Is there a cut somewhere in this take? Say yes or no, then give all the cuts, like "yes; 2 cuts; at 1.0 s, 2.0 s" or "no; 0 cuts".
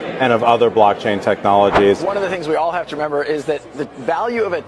yes; 1 cut; at 2.0 s